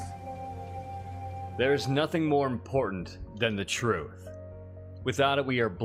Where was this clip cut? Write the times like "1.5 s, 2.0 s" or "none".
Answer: none